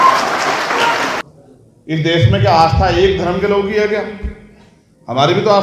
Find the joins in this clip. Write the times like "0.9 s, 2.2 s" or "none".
1.2 s